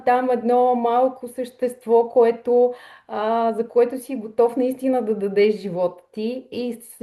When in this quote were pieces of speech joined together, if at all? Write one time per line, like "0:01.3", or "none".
none